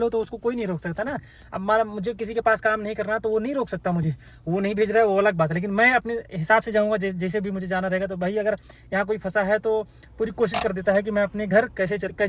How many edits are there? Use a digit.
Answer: 0